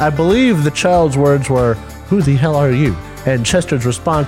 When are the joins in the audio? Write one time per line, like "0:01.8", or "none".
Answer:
0:01.9